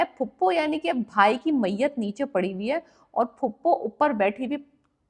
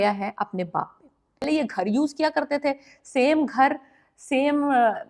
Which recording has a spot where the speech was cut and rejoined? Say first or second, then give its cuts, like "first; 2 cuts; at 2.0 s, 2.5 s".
second; 1 cut; at 1.5 s